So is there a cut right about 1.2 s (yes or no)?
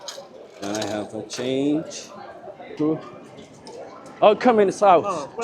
no